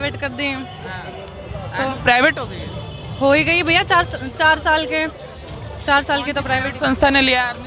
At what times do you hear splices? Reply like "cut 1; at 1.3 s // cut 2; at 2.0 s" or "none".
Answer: none